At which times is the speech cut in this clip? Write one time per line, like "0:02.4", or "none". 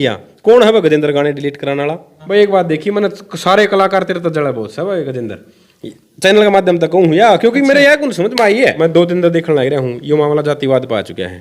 0:02.1
0:08.8

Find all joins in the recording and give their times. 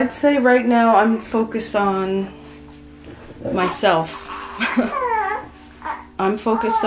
none

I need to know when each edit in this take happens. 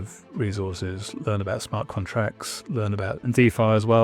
0:01.2
0:03.3

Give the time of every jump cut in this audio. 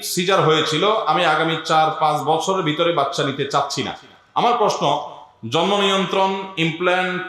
none

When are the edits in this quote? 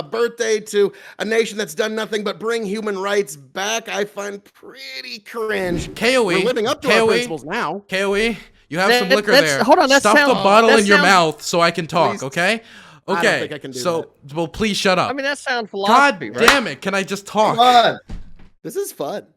0:05.8

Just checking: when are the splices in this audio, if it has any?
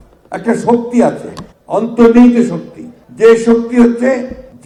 none

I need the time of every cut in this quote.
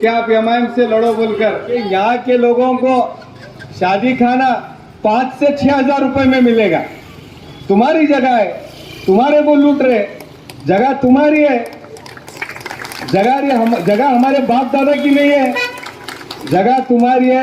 0:01.7

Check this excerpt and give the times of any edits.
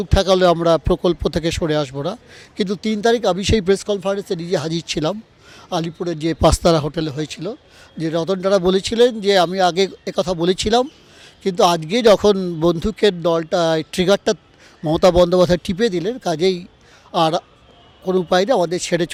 none

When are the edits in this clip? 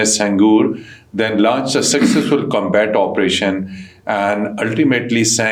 none

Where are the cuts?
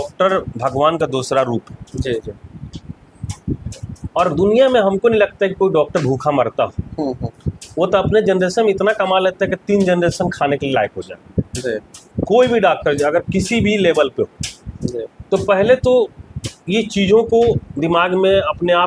none

